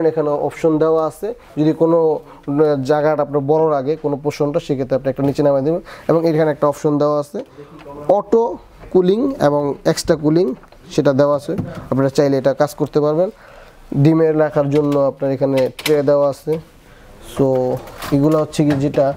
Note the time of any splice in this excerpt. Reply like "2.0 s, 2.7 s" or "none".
none